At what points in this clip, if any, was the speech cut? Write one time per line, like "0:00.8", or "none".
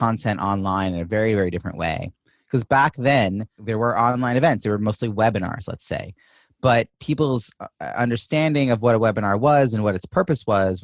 0:03.5